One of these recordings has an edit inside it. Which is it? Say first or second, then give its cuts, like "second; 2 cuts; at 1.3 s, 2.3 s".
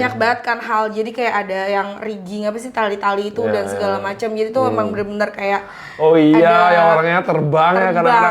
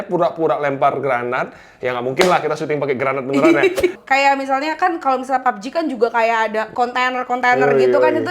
second; 2 cuts; at 4.0 s, 6.7 s